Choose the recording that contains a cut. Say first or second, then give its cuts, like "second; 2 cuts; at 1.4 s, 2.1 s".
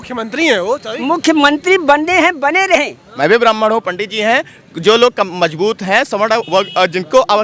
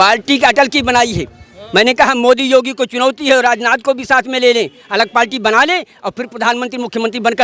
first; 1 cut; at 3.0 s